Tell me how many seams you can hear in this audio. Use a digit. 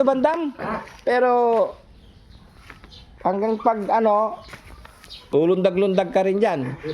0